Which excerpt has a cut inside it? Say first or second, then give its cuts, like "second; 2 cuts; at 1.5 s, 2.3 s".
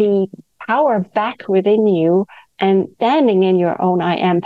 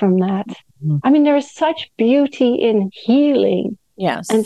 first; 1 cut; at 2.9 s